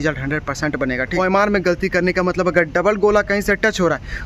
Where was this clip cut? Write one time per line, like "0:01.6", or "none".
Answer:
0:01.2